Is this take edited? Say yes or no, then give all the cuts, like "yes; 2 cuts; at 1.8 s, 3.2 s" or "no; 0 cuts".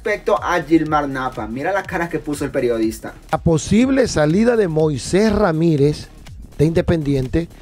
yes; 1 cut; at 3.3 s